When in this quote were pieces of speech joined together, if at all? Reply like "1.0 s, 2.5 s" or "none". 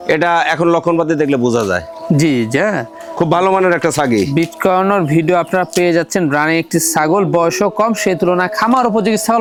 none